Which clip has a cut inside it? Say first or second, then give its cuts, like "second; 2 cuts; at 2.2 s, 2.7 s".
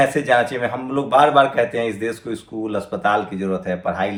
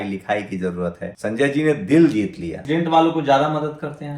second; 2 cuts; at 1.1 s, 2.6 s